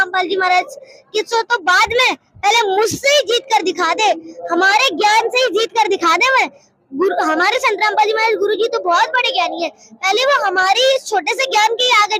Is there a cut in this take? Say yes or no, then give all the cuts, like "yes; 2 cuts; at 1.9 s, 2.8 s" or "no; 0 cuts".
no; 0 cuts